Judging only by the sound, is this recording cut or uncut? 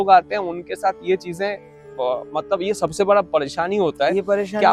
uncut